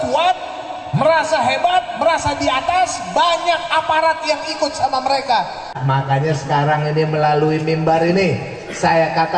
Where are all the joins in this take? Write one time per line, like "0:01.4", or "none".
0:05.8